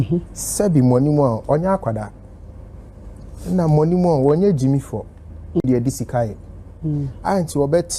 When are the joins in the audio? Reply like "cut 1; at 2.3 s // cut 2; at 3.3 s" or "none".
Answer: none